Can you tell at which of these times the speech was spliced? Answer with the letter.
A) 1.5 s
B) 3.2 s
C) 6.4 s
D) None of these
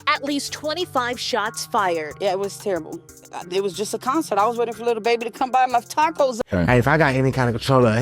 C